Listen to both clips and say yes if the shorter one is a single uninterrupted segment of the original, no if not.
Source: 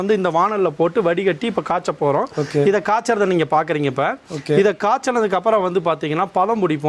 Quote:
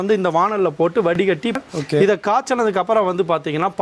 no